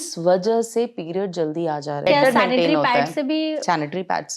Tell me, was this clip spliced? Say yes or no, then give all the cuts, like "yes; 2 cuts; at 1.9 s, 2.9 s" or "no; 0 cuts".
yes; 1 cut; at 2.1 s